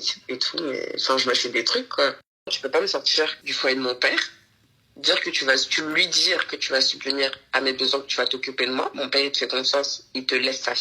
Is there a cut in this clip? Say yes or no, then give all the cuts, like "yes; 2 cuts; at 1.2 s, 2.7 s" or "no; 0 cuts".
yes; 2 cuts; at 2.4 s, 3.4 s